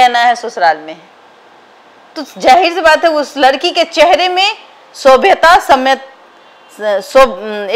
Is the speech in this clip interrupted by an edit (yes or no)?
no